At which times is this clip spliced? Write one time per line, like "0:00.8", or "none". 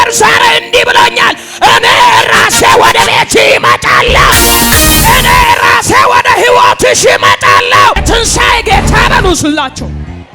0:08.0

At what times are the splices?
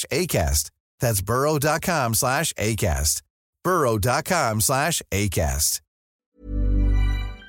0:06.3

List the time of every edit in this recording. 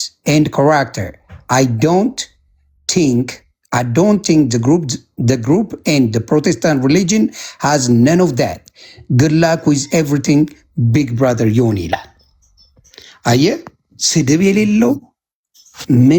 none

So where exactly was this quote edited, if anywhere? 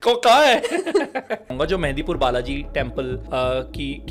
0:01.5
0:03.2

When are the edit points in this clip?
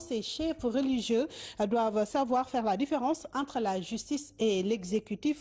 0:03.9

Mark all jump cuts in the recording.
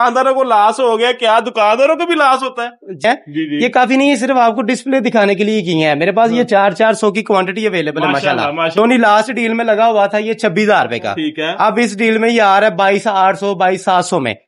0:03.0
0:08.7

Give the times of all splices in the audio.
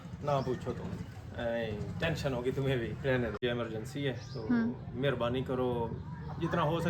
0:03.4

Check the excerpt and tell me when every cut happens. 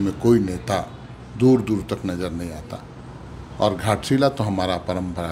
none

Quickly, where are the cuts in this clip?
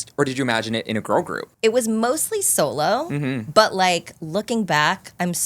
0:01.4

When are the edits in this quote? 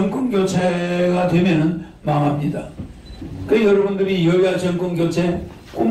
0:03.1

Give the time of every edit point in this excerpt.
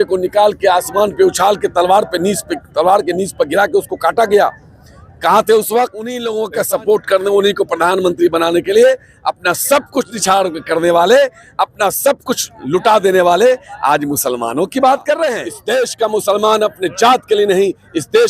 0:06.3
0:15.5

